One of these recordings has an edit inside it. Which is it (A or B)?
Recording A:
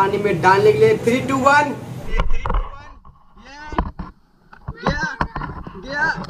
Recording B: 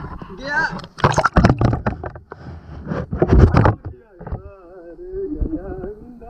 A